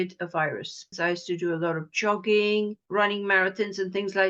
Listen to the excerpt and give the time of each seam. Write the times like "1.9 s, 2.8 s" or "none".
0.9 s, 2.8 s